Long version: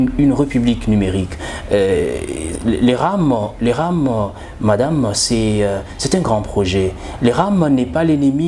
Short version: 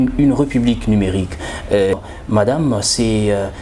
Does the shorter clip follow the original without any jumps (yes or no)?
no